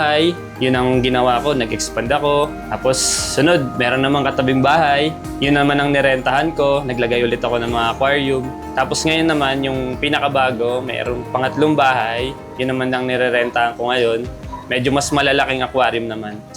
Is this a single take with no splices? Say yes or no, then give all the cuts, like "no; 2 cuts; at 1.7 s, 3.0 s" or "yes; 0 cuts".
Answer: no; 1 cut; at 8.6 s